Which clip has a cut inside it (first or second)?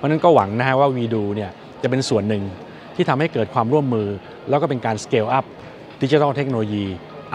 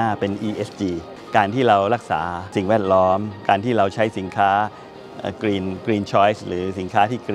second